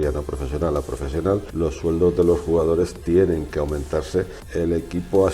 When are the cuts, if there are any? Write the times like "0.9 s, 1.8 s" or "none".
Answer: 1.5 s, 4.4 s